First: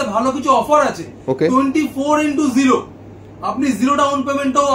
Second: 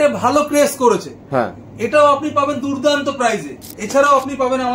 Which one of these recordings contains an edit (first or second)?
second